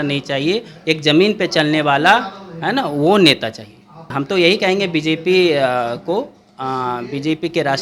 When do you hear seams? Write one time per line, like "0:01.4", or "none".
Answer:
0:04.1